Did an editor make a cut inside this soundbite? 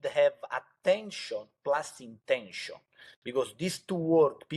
no; 0 cuts

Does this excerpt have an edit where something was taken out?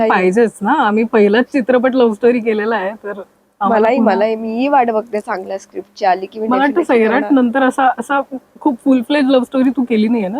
no; 0 cuts

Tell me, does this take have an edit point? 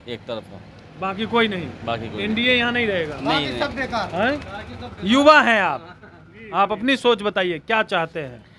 no; 0 cuts

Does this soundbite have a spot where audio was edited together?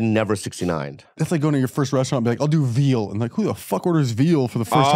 yes; 1 cut; at 1.2 s

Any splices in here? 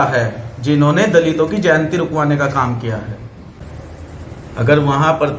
yes; 1 cut; at 3.6 s

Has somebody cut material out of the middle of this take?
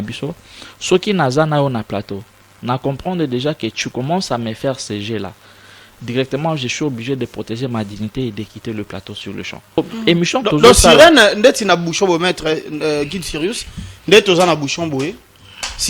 yes; 1 cut; at 9.8 s

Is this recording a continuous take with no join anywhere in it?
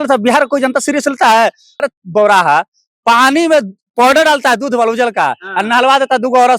no; 1 cut; at 1.8 s

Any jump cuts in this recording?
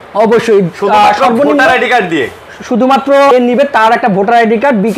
yes; 1 cut; at 3.3 s

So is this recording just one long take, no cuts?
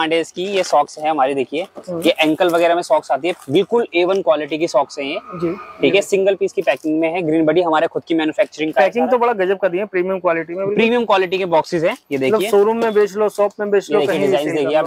yes; 0 cuts

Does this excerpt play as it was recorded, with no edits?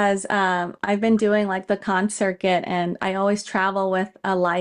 yes; 0 cuts

